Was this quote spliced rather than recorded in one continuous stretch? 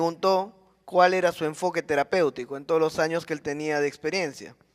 yes; 1 cut; at 1.7 s

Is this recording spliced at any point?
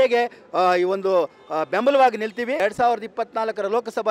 yes; 1 cut; at 2.6 s

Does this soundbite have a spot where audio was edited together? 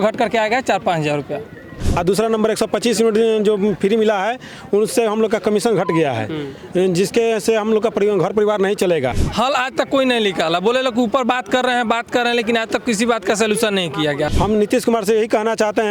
yes; 3 cuts; at 1.8 s, 9.2 s, 14.3 s

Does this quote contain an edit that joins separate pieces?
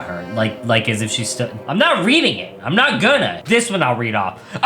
yes; 2 cuts; at 1.6 s, 3.4 s

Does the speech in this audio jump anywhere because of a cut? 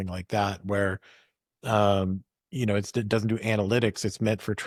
no; 0 cuts

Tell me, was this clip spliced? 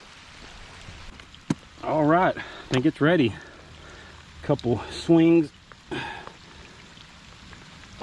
yes; 1 cut; at 1.3 s

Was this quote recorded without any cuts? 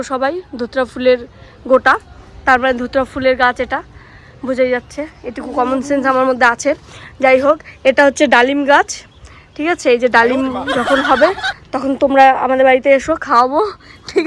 yes; 0 cuts

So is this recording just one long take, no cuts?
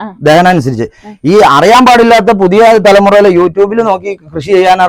yes; 0 cuts

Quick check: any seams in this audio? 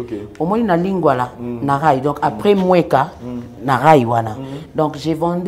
no; 0 cuts

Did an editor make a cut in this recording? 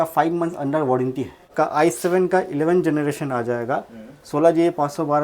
yes; 1 cut; at 1.5 s

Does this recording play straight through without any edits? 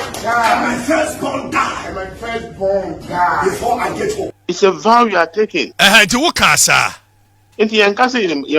no; 2 cuts; at 4.4 s, 5.7 s

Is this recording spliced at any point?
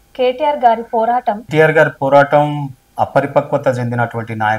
yes; 1 cut; at 1.4 s

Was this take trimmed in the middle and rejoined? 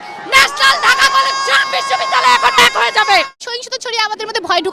yes; 1 cut; at 3.4 s

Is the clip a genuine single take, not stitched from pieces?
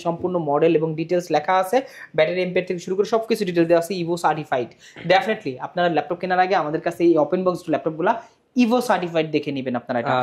yes; 0 cuts

